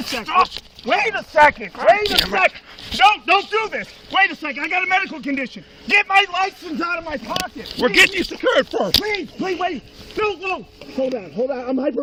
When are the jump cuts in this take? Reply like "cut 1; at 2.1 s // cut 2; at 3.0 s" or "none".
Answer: none